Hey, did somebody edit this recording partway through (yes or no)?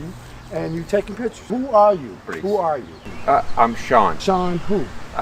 yes